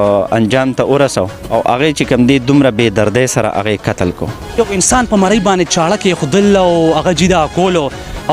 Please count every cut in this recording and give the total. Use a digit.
2